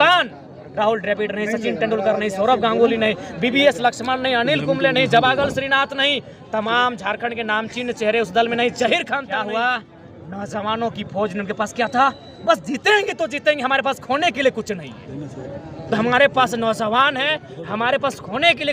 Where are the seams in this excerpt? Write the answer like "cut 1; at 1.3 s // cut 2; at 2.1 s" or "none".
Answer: cut 1; at 9.3 s